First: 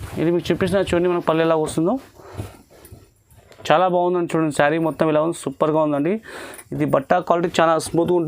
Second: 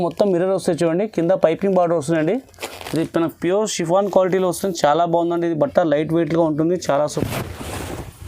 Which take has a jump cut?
second; 1 cut; at 7.2 s

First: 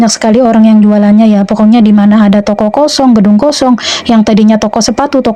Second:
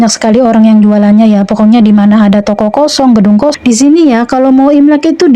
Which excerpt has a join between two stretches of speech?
second; 1 cut; at 3.6 s

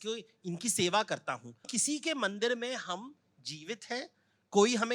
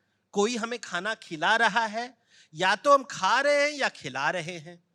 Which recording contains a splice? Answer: first; 1 cut; at 1.7 s

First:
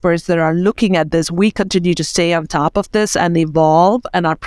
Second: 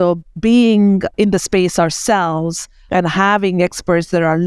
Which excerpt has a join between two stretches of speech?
second; 2 cuts; at 1.1 s, 2.8 s

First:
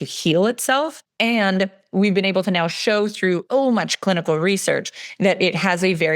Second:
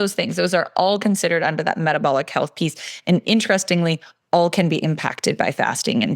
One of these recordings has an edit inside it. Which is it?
first; 2 cuts; at 1.0 s, 3.5 s

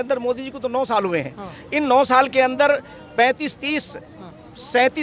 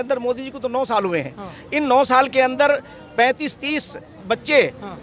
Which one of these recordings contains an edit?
second; 1 cut; at 4.1 s

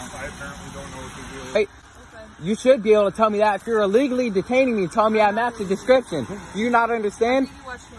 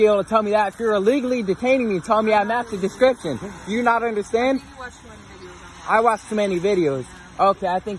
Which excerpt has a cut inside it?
first; 1 cut; at 1.6 s

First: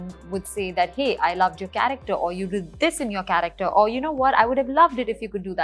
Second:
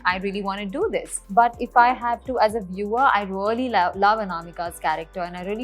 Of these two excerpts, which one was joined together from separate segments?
second; 1 cut; at 1.2 s

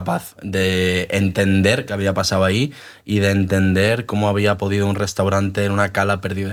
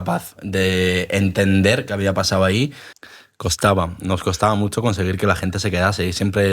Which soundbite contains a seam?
second; 1 cut; at 2.9 s

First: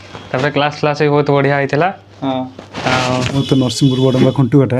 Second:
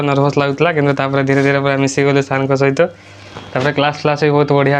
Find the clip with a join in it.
first; 1 cut; at 3.4 s

